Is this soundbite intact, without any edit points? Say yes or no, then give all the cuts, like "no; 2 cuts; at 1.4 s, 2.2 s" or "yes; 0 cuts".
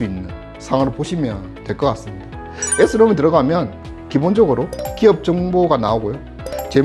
yes; 0 cuts